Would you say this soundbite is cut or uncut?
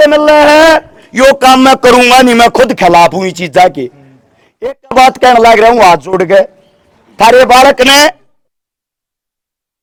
uncut